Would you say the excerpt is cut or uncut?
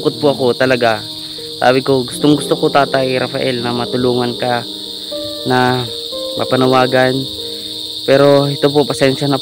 uncut